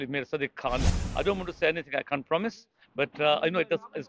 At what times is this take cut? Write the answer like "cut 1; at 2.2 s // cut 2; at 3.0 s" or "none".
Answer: cut 1; at 1.0 s